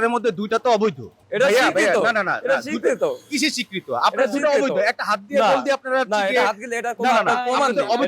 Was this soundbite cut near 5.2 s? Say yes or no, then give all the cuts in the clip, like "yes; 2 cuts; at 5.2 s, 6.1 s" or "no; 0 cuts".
no; 1 cut; at 1.2 s